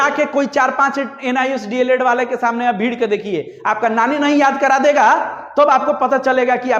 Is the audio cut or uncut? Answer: uncut